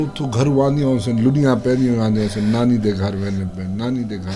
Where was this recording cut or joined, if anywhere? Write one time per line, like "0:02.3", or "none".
none